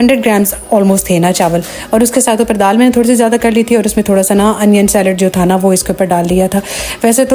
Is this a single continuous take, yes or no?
yes